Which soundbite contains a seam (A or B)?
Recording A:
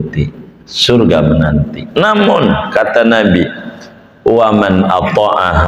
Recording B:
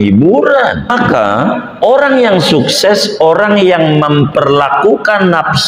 B